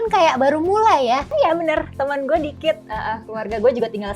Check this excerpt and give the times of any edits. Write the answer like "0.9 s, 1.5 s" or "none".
1.3 s

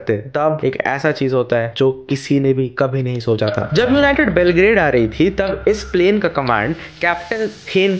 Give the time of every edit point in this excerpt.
none

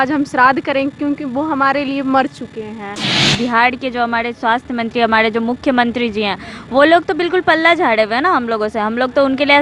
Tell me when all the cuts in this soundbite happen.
3.2 s

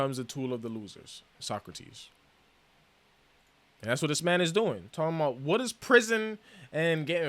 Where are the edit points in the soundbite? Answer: none

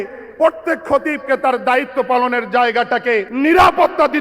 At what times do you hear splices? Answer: 3.3 s

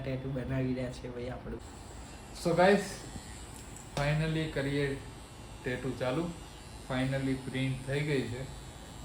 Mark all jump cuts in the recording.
1.6 s

